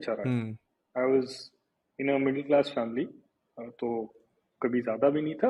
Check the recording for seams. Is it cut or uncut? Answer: uncut